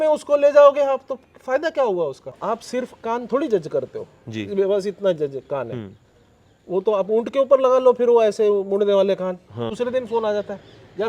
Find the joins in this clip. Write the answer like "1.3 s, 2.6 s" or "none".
2.4 s, 9.7 s